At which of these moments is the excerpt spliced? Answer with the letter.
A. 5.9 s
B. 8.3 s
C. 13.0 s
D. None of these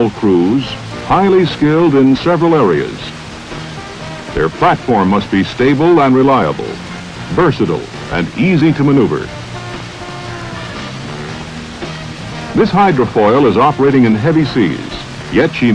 D